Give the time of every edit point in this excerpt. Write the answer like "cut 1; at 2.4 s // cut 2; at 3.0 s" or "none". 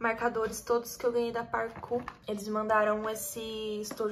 cut 1; at 2.1 s